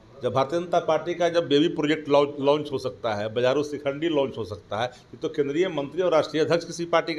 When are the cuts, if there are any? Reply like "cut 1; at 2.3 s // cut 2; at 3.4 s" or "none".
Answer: none

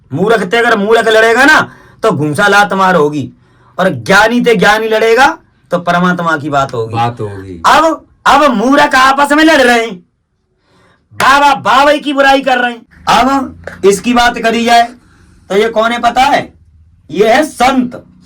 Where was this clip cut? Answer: cut 1; at 12.9 s

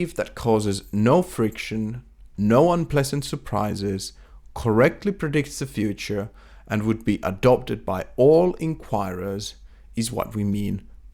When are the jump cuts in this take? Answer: none

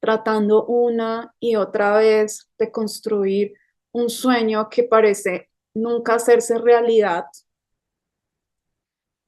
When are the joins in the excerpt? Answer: none

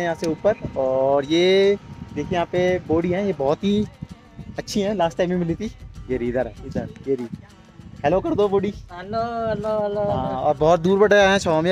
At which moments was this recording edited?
none

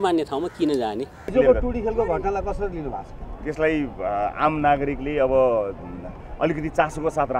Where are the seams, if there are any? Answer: cut 1; at 1.3 s

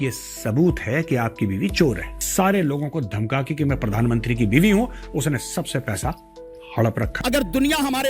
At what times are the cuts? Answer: cut 1; at 2.1 s // cut 2; at 7.1 s

